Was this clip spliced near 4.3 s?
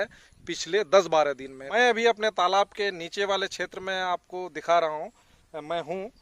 no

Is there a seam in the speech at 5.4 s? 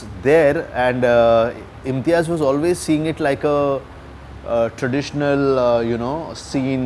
no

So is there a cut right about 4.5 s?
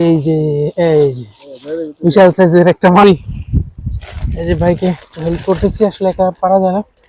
no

